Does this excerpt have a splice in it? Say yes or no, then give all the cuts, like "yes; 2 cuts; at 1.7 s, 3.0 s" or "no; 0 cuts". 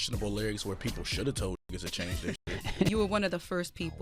yes; 1 cut; at 2.9 s